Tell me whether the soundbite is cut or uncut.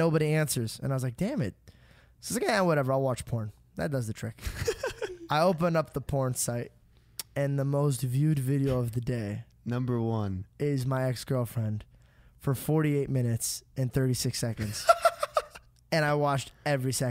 uncut